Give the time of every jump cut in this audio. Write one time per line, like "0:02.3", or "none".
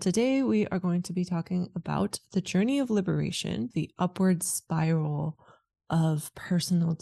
0:03.7